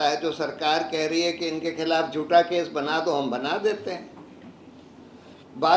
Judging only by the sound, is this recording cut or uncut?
uncut